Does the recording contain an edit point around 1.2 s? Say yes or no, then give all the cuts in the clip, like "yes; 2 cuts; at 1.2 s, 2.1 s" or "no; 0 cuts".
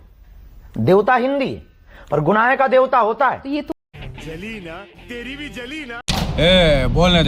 no; 2 cuts; at 3.7 s, 6.0 s